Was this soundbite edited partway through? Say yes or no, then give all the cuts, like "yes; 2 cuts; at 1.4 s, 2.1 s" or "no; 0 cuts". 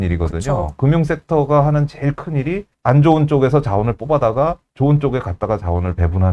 yes; 1 cut; at 2.7 s